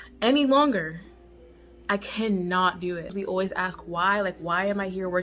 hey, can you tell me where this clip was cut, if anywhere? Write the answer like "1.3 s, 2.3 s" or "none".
3.1 s